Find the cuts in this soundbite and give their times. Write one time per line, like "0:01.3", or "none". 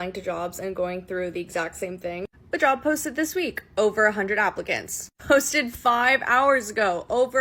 none